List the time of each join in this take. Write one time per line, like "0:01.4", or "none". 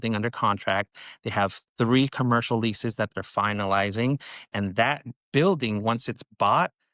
none

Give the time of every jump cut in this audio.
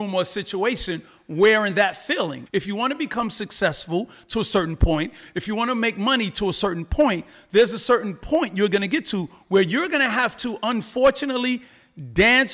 0:02.4

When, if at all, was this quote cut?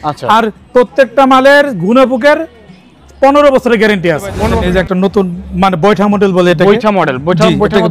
0:04.4

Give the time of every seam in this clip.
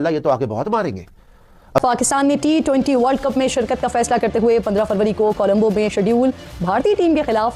0:01.8

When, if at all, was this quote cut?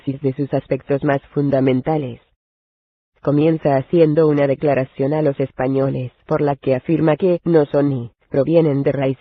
none

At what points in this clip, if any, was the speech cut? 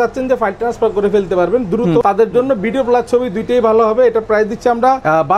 none

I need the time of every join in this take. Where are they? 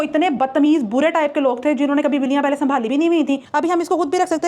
0:03.5

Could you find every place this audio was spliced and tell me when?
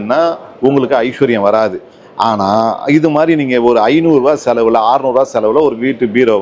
none

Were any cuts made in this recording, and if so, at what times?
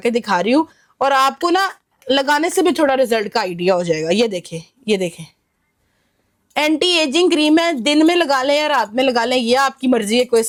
none

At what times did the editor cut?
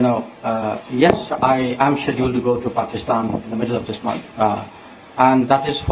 none

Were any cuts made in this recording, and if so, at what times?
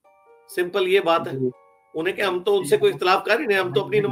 none

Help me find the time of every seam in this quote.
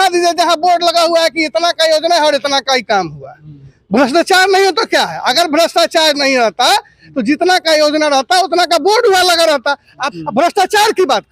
0:10.0

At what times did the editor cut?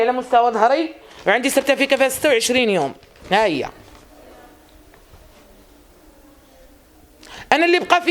none

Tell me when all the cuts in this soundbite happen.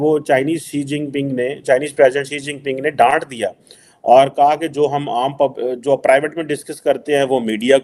none

